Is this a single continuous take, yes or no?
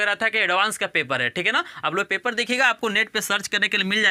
yes